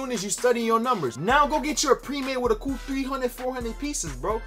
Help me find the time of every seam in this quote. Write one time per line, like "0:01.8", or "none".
none